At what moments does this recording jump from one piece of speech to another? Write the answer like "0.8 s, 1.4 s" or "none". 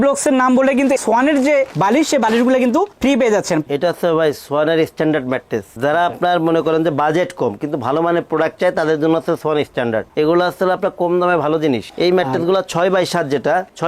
3.6 s, 11.9 s